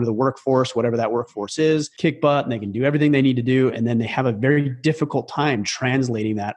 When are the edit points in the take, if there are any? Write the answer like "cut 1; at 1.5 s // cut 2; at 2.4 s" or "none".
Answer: cut 1; at 1.9 s